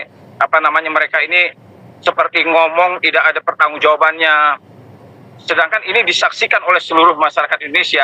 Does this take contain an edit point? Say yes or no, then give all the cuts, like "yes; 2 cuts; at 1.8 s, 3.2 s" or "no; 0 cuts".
no; 0 cuts